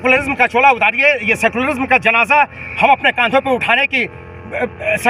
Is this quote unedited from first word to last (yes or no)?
yes